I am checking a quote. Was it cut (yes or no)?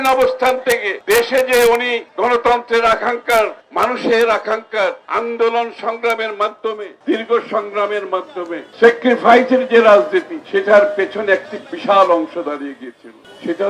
no